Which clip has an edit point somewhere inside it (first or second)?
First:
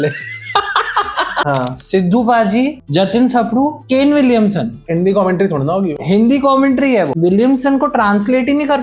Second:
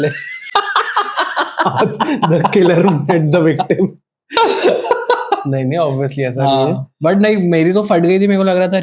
first